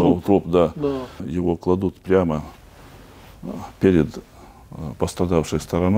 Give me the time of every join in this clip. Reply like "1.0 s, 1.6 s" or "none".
1.3 s